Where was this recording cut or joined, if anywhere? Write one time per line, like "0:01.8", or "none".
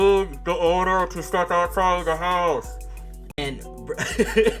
0:03.4